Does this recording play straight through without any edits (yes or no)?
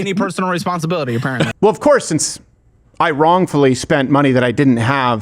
no